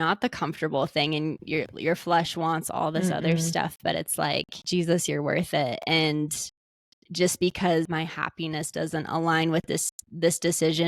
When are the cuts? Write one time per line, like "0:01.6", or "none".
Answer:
0:04.6
0:07.9